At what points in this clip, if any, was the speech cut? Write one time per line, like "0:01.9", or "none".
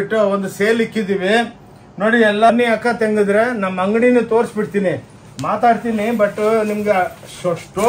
0:02.5